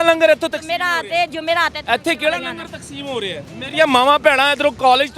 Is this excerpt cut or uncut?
cut